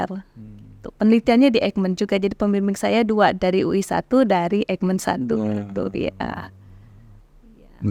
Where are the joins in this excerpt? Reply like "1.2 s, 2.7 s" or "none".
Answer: none